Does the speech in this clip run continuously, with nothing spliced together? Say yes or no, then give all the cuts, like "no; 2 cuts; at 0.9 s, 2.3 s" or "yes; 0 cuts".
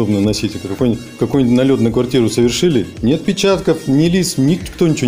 yes; 0 cuts